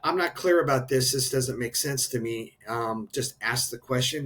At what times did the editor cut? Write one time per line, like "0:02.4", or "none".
none